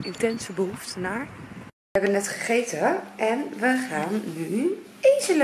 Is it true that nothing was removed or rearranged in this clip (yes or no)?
no